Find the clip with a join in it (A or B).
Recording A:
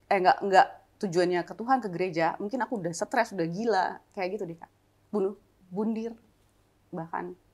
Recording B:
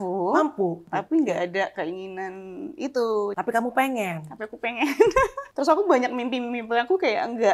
B